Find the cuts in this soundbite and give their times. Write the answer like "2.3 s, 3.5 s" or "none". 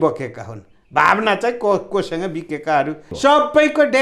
3.1 s